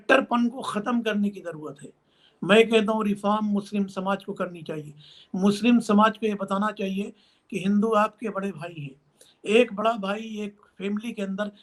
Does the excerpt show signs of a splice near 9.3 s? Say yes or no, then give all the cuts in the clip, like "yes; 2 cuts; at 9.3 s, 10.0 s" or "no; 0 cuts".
no; 0 cuts